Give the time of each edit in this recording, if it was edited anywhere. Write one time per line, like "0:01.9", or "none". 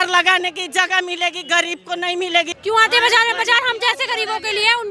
0:02.5